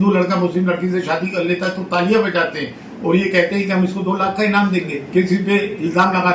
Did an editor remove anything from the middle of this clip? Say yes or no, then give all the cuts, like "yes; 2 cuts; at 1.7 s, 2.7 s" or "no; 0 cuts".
yes; 1 cut; at 5.0 s